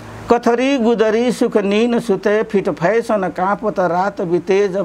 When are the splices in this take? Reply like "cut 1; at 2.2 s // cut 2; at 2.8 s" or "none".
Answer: none